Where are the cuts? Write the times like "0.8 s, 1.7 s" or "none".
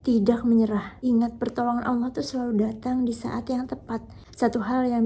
0.9 s